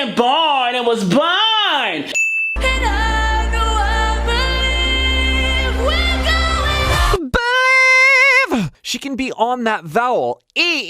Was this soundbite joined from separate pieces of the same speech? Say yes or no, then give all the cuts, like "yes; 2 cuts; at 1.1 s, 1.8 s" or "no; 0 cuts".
yes; 3 cuts; at 2.2 s, 5.6 s, 7.1 s